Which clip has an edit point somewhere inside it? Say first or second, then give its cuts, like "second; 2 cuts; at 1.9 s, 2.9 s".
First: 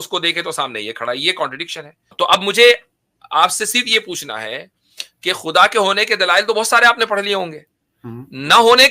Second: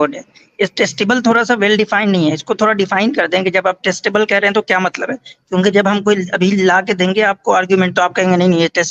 first; 1 cut; at 2.1 s